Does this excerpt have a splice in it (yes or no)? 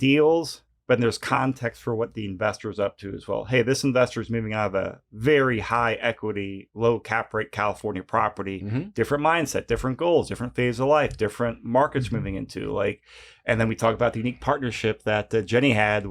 yes